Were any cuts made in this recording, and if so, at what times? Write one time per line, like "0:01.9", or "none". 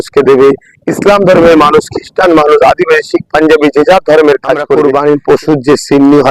0:04.8